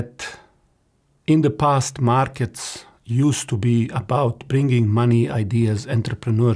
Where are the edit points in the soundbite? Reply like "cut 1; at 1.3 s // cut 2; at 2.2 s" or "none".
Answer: none